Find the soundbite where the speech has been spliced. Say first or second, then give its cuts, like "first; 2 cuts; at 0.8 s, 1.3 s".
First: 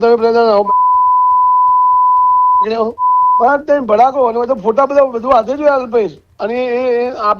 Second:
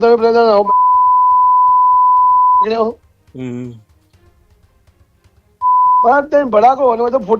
first; 2 cuts; at 2.9 s, 6.2 s